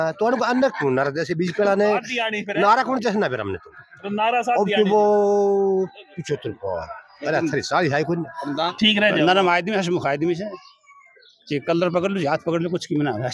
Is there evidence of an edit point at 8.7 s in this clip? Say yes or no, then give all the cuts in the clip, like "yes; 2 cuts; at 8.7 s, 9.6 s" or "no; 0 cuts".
yes; 1 cut; at 8.7 s